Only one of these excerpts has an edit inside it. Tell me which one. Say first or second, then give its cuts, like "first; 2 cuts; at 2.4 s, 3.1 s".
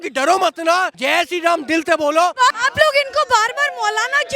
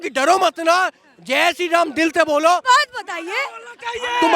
first; 2 cuts; at 1.0 s, 2.6 s